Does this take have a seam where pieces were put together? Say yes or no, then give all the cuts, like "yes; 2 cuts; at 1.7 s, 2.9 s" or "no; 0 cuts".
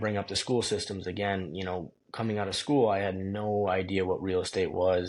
no; 0 cuts